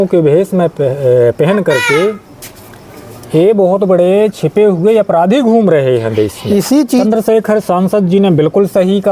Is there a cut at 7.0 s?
yes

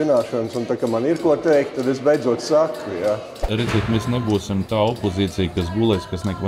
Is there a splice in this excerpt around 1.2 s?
no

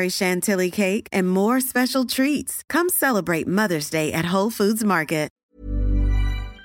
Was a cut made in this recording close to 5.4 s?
yes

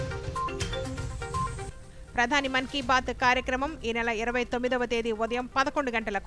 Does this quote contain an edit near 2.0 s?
yes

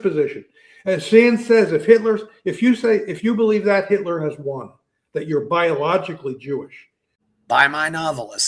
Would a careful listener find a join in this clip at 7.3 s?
yes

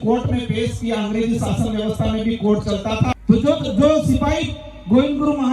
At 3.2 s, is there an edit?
yes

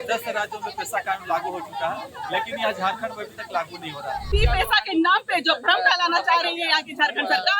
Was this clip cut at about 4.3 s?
yes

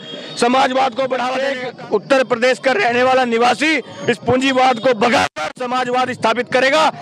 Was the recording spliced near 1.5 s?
yes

